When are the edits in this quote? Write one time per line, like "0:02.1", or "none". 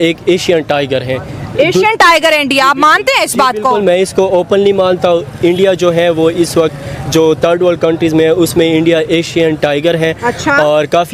none